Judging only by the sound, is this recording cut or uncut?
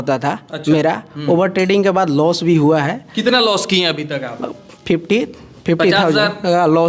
uncut